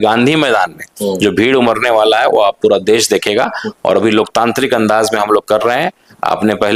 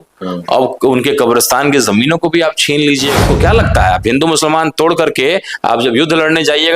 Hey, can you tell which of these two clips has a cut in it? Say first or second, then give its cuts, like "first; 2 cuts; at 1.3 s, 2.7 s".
second; 1 cut; at 3.2 s